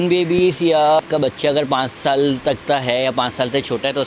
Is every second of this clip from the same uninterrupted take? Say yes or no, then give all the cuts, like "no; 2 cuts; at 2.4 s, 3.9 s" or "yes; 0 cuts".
no; 1 cut; at 1.0 s